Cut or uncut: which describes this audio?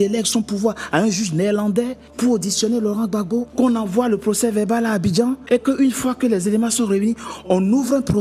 cut